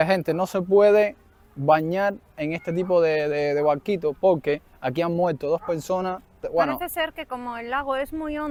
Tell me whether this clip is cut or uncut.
uncut